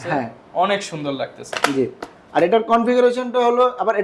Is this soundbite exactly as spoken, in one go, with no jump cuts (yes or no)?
yes